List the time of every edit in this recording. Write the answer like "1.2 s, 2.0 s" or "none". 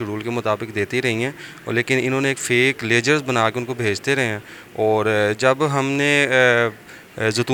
none